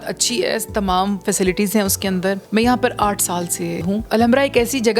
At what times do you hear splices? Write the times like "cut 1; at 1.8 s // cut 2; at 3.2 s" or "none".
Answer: cut 1; at 2.4 s // cut 2; at 4.0 s